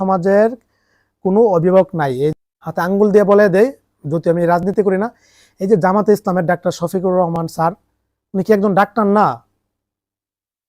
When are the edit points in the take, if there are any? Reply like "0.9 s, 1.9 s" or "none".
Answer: 2.3 s